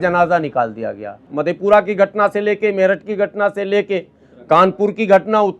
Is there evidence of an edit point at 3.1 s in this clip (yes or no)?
no